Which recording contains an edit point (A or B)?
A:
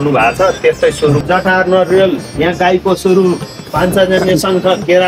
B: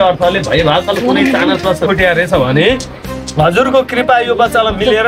A